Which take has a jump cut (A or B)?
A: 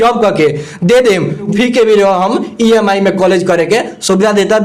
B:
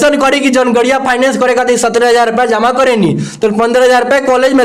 A